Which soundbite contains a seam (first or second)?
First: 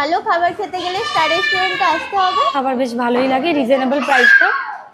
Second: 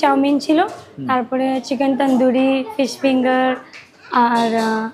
first